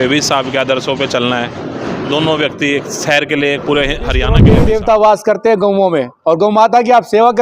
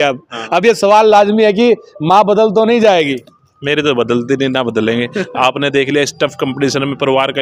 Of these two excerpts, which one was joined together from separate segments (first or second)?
first